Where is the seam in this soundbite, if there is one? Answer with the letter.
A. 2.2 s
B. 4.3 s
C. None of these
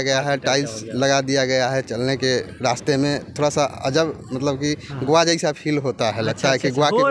C